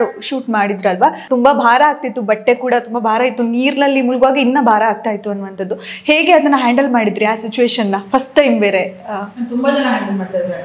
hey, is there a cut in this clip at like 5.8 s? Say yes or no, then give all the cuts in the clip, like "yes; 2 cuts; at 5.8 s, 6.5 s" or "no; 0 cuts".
no; 1 cut; at 1.2 s